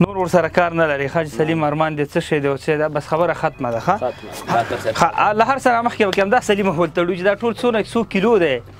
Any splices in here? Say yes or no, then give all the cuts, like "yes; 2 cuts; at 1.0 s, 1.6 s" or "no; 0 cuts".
yes; 1 cut; at 4.3 s